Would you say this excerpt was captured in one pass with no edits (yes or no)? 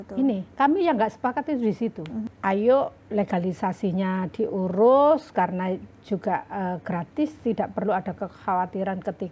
no